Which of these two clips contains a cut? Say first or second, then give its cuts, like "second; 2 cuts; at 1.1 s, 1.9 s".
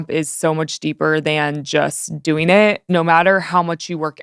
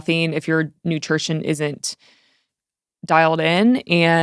first; 1 cut; at 2.8 s